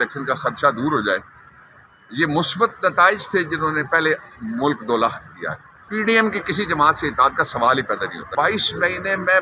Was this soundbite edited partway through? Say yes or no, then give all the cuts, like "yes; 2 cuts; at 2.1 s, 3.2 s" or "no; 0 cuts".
yes; 2 cuts; at 5.8 s, 8.3 s